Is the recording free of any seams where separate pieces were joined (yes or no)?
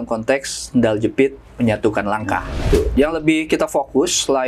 no